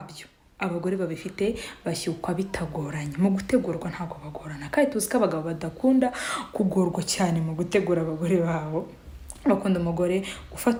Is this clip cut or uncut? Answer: uncut